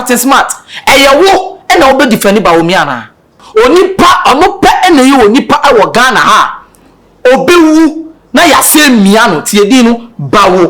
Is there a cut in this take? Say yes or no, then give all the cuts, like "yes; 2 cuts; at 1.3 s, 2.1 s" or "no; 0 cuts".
yes; 1 cut; at 3.4 s